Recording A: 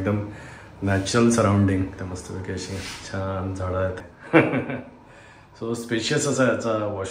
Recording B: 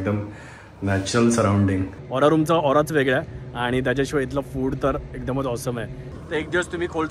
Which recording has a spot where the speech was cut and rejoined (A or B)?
B